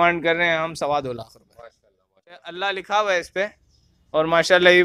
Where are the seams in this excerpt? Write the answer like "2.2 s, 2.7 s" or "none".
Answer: 2.3 s